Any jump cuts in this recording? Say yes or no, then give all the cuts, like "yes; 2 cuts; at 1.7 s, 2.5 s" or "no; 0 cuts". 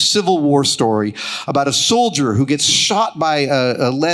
no; 0 cuts